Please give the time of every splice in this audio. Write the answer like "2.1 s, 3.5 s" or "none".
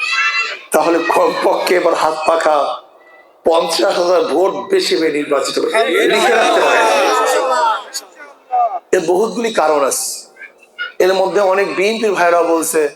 none